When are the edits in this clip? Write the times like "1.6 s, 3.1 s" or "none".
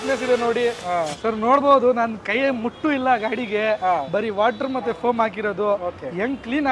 none